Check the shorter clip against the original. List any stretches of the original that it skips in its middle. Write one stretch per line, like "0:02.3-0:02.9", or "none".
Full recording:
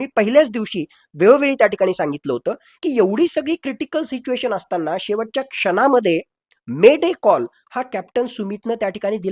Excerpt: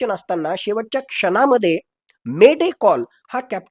none